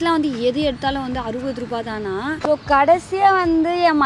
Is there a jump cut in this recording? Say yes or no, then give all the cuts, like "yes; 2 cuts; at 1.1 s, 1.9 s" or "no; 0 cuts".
yes; 1 cut; at 2.4 s